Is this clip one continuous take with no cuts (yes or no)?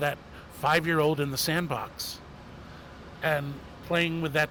yes